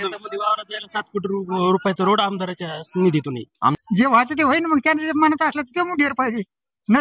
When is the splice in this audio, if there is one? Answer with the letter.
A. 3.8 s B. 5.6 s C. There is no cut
A